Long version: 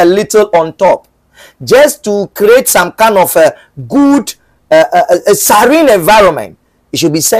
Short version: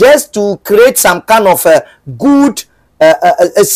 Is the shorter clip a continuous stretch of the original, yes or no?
yes